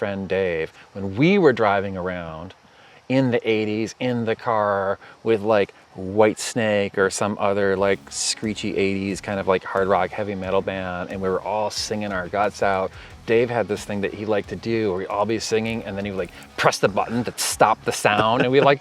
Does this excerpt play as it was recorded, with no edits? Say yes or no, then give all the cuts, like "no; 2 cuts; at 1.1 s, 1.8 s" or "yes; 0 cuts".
yes; 0 cuts